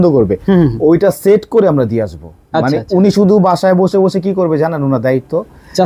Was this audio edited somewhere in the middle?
no; 0 cuts

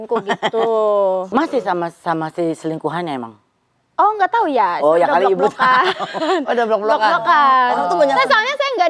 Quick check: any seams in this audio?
yes; 1 cut; at 1.3 s

